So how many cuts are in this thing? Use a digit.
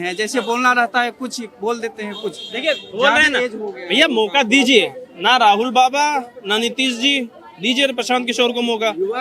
0